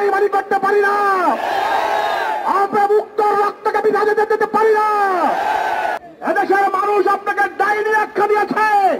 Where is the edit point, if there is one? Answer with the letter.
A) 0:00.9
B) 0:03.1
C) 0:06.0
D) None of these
C